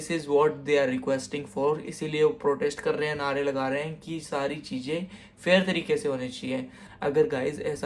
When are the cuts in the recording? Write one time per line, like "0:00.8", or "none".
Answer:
0:06.8